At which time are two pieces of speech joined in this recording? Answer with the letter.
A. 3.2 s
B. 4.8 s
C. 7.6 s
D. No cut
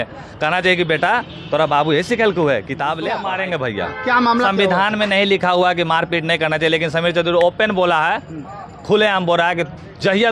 A